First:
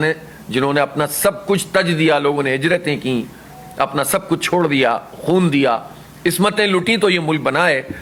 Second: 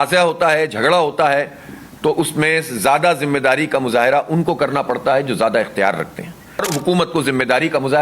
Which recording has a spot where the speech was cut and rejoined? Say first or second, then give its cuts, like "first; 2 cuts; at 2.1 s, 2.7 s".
second; 1 cut; at 6.7 s